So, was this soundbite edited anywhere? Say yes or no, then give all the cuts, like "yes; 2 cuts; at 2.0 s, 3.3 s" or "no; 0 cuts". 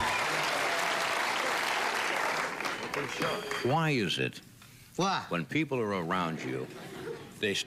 no; 0 cuts